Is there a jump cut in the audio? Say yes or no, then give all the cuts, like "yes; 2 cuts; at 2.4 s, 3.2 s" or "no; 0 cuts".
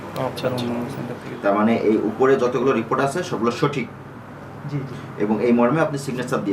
yes; 1 cut; at 1.2 s